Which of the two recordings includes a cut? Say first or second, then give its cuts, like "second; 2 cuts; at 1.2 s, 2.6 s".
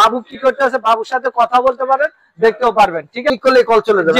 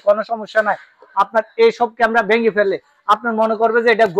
first; 1 cut; at 3.3 s